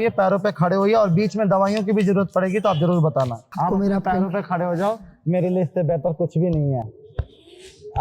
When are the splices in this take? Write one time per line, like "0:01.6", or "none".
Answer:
0:03.4